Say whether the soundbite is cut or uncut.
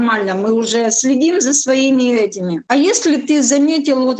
cut